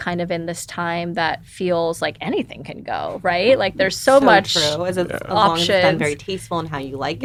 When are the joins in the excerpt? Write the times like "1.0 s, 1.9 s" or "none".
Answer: none